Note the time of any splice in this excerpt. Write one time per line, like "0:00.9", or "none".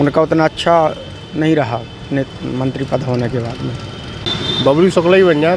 0:04.2